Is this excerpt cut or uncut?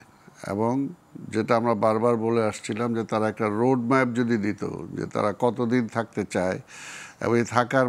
uncut